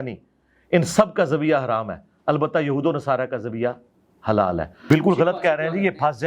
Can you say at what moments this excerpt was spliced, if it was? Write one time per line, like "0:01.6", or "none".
0:04.8